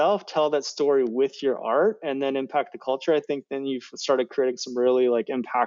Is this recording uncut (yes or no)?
yes